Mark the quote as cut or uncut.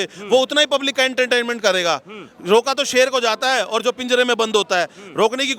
uncut